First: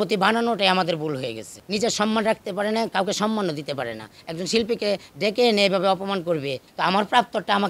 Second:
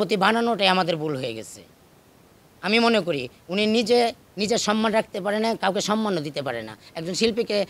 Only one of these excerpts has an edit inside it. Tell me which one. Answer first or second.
first